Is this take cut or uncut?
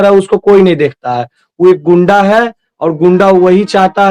uncut